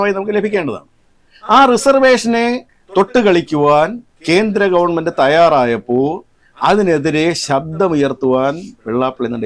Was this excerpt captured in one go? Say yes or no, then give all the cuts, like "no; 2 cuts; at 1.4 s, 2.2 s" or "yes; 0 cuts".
yes; 0 cuts